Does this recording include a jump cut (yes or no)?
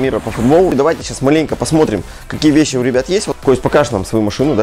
yes